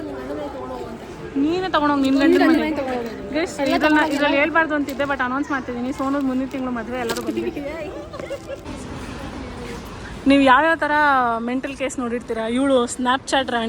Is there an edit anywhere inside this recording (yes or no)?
yes